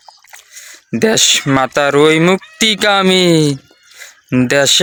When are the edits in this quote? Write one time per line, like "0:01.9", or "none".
none